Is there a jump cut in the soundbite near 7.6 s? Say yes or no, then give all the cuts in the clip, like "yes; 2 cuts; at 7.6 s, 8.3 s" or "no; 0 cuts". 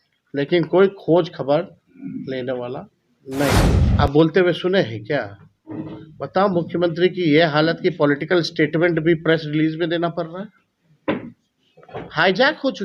no; 1 cut; at 3.8 s